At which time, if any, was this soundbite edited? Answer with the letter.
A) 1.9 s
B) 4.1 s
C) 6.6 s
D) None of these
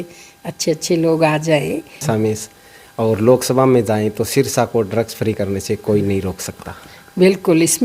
A